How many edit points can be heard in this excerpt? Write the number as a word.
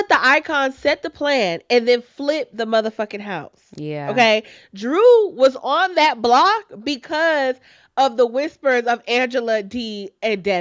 zero